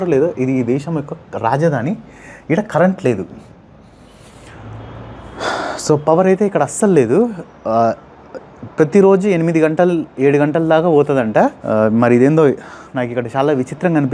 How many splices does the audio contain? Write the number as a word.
zero